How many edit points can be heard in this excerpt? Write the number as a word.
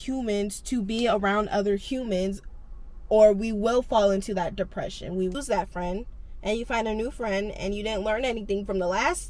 one